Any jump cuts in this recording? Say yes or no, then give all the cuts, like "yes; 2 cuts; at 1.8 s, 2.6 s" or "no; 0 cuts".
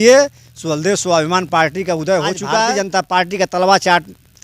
yes; 1 cut; at 2.6 s